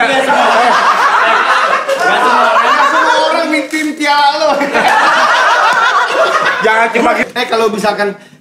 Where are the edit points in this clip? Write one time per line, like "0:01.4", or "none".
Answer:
0:07.2